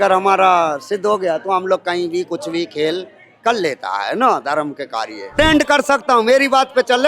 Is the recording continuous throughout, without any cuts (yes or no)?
no